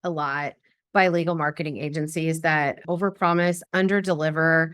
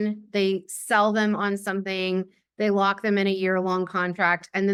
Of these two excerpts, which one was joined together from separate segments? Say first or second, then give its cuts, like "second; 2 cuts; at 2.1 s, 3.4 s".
first; 2 cuts; at 2.8 s, 3.6 s